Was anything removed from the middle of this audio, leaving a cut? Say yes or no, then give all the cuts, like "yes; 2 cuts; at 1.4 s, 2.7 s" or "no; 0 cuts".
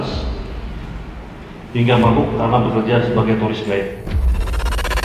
no; 0 cuts